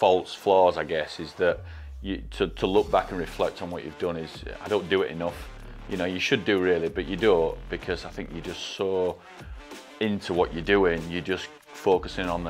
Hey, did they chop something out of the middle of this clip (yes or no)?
no